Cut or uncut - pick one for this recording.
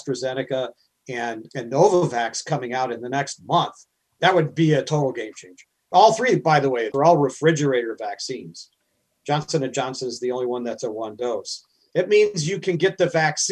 cut